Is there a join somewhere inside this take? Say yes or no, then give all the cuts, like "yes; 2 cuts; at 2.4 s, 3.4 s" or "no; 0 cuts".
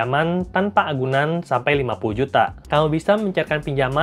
yes; 1 cut; at 2.6 s